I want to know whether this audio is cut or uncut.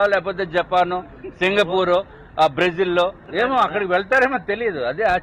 uncut